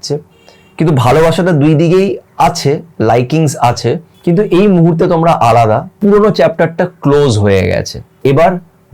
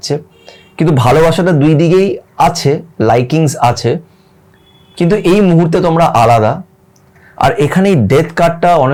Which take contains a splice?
first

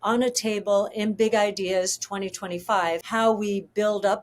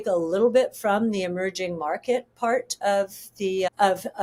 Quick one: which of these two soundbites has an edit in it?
first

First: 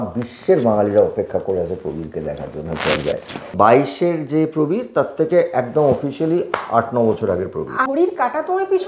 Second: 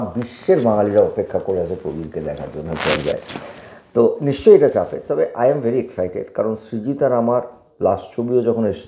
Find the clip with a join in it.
first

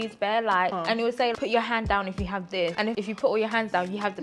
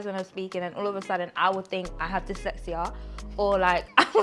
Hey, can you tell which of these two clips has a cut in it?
first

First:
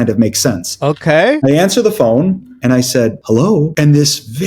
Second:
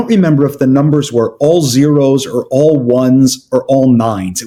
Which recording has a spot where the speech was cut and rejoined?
first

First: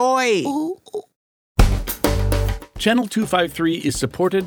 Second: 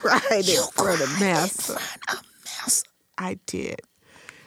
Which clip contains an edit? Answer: first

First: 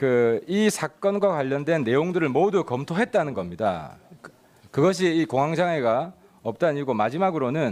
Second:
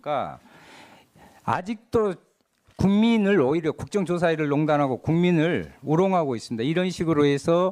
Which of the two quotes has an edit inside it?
second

